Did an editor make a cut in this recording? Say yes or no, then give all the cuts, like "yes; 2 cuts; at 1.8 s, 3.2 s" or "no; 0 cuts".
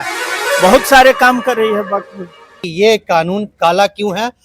yes; 1 cut; at 2.6 s